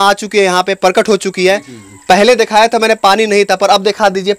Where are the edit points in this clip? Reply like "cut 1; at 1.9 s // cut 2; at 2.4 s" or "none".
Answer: none